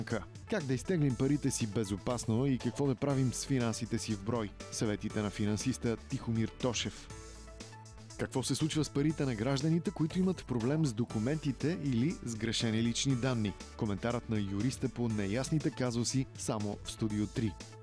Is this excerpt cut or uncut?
uncut